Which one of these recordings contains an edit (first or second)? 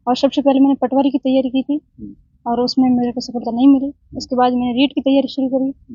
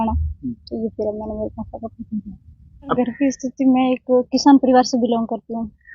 second